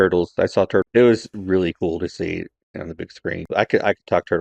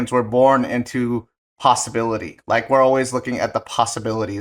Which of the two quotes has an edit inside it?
first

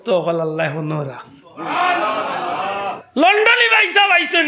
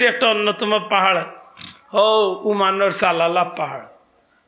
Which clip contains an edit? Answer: first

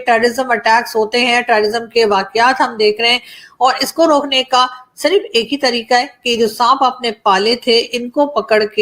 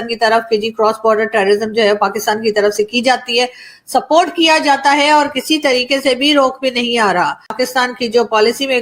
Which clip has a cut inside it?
second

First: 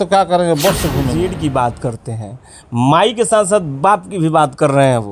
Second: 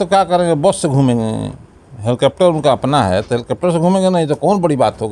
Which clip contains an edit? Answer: first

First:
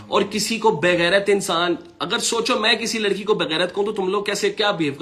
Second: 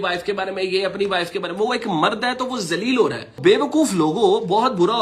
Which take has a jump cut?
second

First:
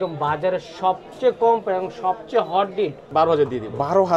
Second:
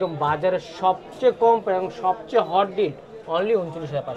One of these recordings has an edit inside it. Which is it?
first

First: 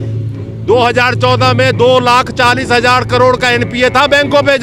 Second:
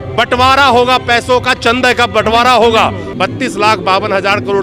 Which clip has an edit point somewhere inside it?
second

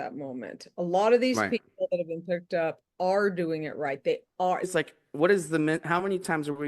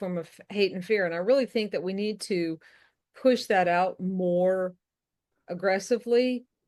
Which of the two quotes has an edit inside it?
first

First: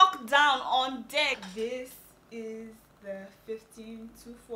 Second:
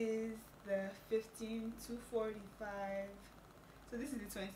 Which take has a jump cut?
first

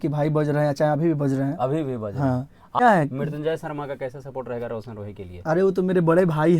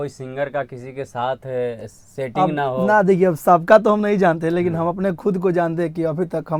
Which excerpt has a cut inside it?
first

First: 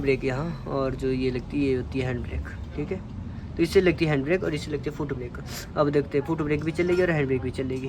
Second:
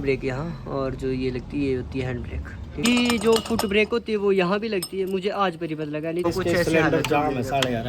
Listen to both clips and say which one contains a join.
second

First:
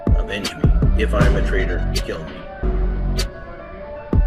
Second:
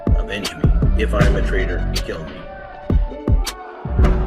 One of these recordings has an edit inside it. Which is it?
second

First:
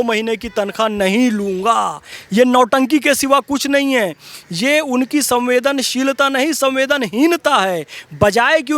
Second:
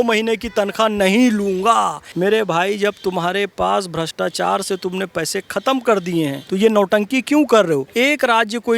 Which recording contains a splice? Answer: second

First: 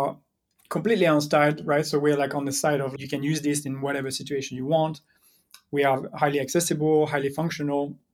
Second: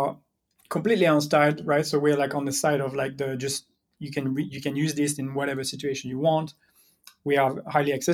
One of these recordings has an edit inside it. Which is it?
first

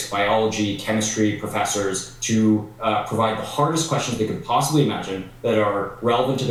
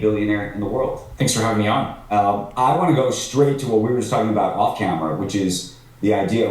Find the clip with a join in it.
second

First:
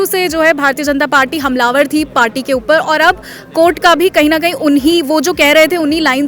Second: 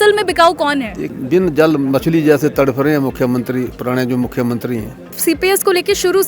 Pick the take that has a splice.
second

